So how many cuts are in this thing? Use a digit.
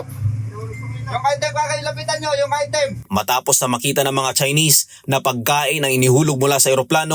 1